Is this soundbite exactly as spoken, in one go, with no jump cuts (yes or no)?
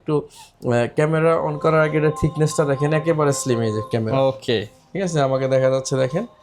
yes